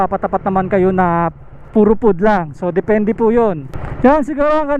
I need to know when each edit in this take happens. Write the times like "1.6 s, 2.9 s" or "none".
none